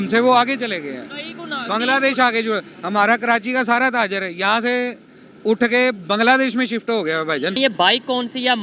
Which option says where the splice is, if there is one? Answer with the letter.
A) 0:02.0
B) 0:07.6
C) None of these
B